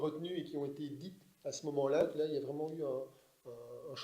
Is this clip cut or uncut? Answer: cut